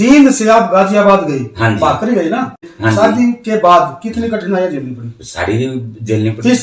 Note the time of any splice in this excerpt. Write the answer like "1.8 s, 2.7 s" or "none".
2.7 s

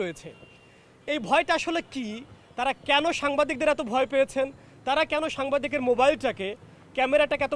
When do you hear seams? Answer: none

